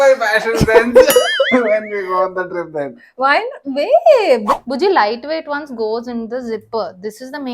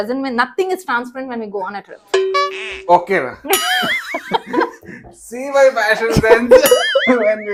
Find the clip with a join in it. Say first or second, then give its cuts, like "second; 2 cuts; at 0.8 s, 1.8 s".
first; 1 cut; at 4.5 s